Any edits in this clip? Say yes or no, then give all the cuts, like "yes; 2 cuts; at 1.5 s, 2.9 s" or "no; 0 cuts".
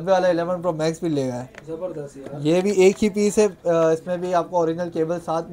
no; 0 cuts